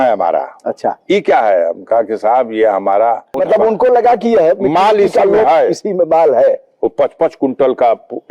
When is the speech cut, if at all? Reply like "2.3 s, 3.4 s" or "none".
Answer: 3.3 s